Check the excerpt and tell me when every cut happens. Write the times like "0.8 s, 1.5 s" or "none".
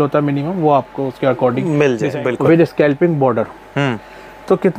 2.1 s